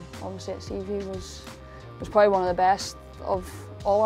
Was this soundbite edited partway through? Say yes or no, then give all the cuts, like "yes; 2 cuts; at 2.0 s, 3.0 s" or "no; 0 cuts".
no; 0 cuts